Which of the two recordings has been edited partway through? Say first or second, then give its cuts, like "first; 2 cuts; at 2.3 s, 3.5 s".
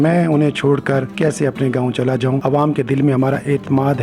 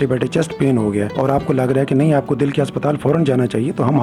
first; 2 cuts; at 1.1 s, 2.4 s